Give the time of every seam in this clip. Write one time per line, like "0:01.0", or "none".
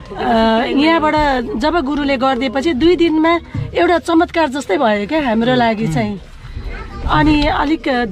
none